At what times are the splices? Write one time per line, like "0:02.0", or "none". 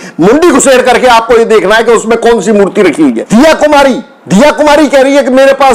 0:03.2